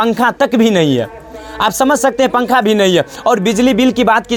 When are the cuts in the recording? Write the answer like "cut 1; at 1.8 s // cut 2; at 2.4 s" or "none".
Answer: none